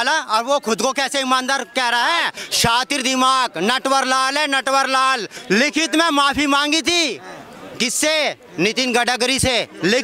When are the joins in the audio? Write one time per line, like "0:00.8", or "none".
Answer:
0:02.4
0:05.3